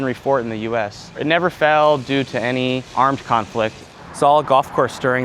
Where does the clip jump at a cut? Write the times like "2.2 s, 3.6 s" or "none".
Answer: 1.2 s, 2.9 s, 3.9 s